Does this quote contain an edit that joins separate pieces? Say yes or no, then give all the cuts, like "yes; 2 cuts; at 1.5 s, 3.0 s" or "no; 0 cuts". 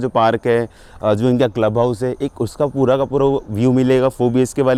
no; 0 cuts